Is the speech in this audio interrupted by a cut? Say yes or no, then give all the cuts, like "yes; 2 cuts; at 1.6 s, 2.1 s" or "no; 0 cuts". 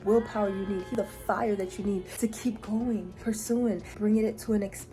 yes; 3 cuts; at 0.9 s, 2.1 s, 3.3 s